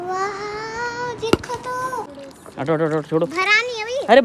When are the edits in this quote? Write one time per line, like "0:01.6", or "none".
0:02.1

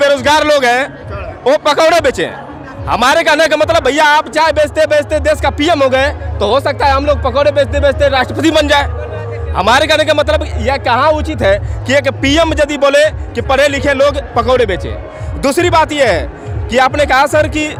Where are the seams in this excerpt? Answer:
none

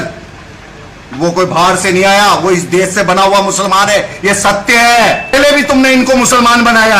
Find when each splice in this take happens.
0:05.3

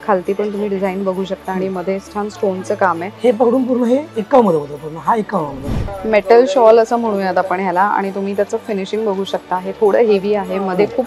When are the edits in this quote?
0:06.0

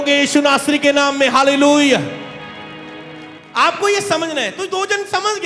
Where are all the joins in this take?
0:03.4

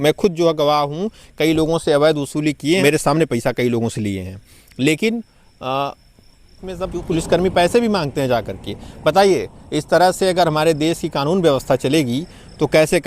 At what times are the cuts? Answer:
0:02.8
0:06.8

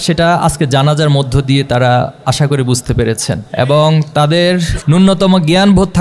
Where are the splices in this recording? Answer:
0:03.5
0:04.7

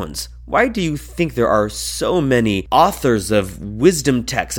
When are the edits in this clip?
0:02.6

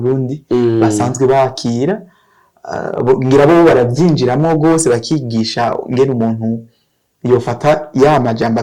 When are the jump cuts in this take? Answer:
none

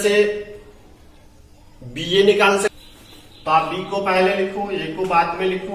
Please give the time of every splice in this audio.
0:02.7

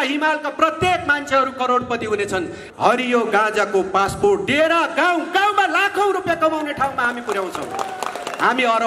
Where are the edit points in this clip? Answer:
0:02.6

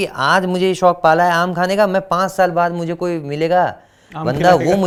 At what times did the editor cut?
none

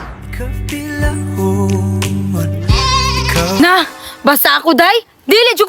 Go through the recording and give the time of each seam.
0:03.6

